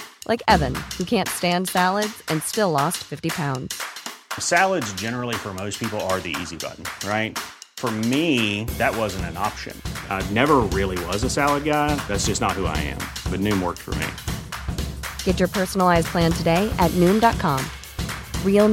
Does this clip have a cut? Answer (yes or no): no